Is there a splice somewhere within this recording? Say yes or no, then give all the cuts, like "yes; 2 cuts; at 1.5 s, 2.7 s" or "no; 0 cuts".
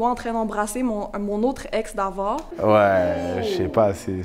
yes; 1 cut; at 2.5 s